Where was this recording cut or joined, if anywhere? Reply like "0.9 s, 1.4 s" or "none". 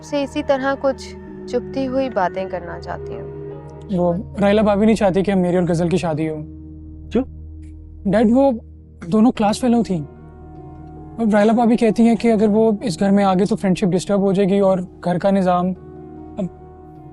3.7 s